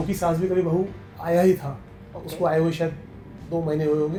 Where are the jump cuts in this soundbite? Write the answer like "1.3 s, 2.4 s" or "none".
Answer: none